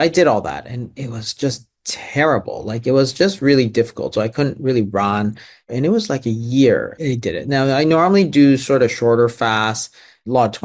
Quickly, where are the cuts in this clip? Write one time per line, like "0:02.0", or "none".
none